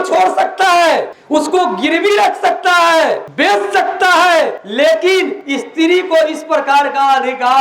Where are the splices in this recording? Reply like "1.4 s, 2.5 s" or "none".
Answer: 1.2 s, 3.3 s, 4.6 s, 5.4 s